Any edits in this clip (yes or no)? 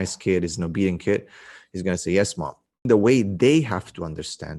yes